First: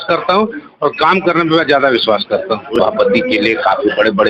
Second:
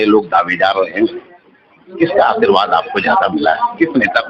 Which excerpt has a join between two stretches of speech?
first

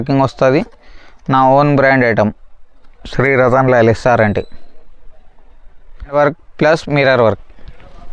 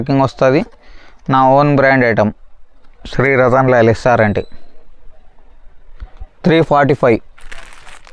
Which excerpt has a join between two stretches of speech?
first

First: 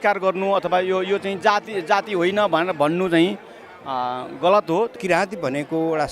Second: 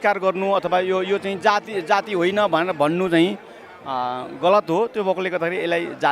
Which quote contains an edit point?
first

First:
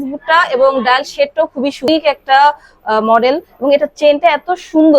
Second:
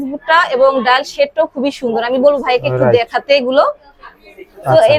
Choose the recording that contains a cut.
first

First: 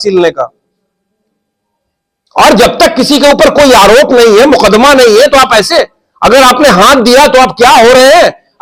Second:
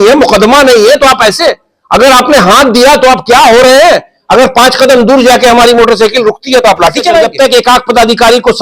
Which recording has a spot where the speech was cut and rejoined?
second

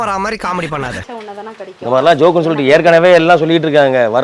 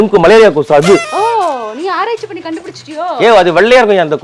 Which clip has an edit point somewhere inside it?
second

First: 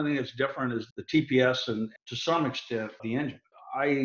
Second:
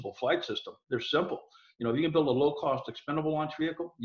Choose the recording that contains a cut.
first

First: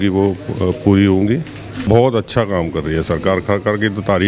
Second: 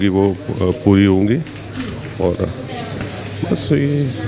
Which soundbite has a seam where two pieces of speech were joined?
first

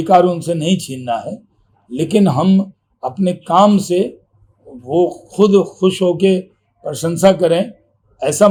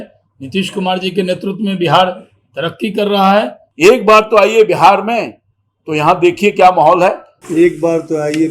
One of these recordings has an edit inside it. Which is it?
second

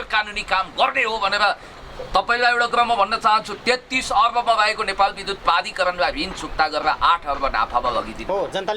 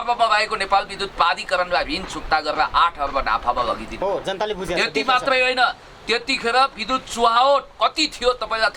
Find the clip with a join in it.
first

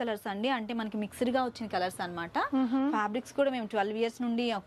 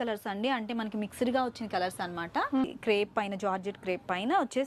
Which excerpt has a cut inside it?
second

